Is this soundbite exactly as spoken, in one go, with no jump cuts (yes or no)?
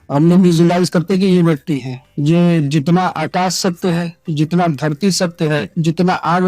no